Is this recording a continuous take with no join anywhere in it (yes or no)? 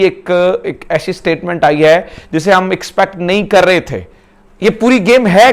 yes